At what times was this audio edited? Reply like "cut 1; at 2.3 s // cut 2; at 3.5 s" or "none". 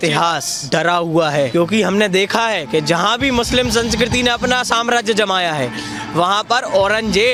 none